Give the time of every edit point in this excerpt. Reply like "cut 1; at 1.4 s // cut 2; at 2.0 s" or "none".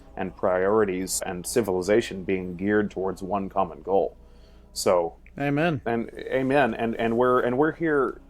cut 1; at 1.3 s